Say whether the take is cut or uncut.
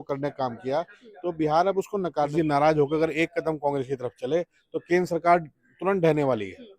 cut